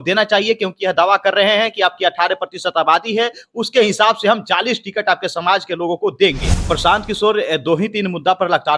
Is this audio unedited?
no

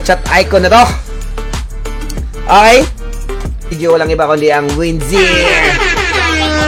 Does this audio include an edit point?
no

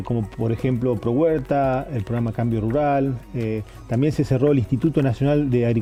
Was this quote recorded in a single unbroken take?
yes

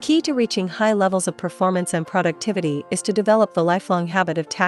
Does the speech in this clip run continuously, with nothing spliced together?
yes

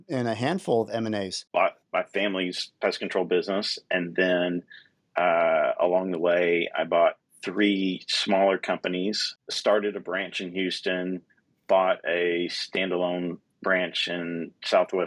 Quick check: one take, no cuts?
no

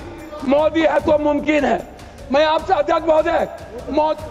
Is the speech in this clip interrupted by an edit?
no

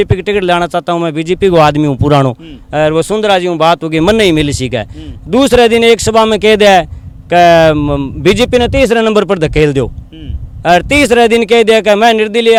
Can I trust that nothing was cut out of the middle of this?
yes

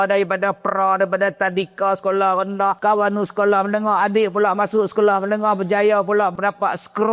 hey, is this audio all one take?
no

